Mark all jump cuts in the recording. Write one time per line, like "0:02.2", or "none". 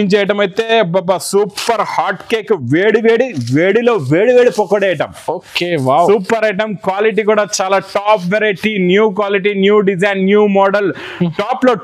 none